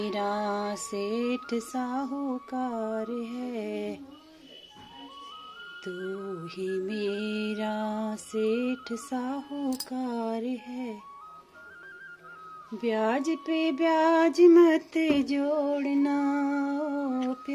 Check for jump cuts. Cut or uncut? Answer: uncut